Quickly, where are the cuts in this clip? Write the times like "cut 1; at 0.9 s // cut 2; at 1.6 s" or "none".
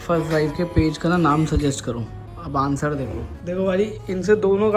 cut 1; at 3.3 s

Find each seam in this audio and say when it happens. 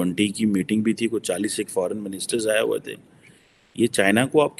none

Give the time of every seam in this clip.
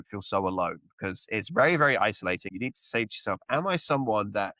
cut 1; at 2.5 s

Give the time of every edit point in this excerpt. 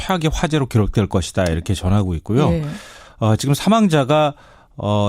cut 1; at 2.0 s

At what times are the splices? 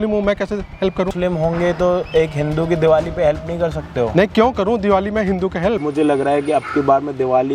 cut 1; at 1.1 s // cut 2; at 5.8 s

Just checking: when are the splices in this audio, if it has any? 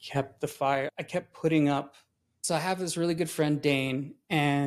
none

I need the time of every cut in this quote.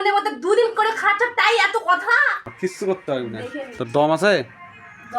cut 1; at 2.3 s

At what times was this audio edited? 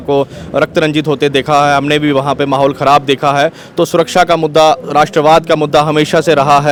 none

